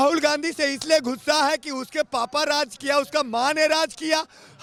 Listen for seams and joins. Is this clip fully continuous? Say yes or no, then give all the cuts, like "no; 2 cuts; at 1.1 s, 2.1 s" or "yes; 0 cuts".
yes; 0 cuts